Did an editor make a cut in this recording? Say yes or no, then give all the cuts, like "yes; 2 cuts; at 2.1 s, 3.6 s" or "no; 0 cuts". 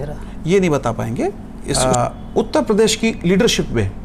yes; 1 cut; at 1.7 s